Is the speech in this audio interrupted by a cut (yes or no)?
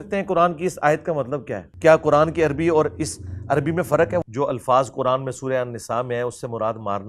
yes